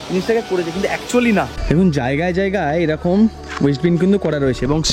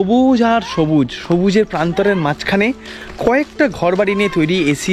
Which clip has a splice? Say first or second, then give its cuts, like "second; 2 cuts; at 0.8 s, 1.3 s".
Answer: first; 1 cut; at 1.6 s